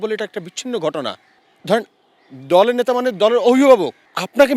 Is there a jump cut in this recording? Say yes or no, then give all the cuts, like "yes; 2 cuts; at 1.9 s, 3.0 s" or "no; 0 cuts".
no; 0 cuts